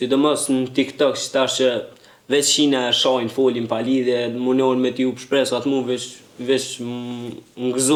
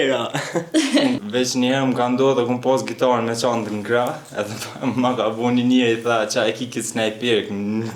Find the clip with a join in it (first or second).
second